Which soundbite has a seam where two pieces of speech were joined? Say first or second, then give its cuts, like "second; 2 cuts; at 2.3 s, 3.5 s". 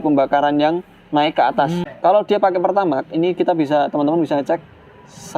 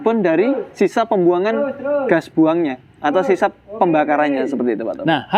first; 1 cut; at 1.8 s